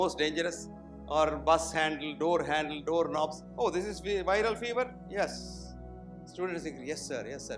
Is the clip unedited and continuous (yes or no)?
no